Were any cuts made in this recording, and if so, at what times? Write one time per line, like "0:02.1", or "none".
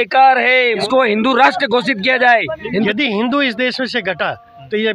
0:00.8
0:02.9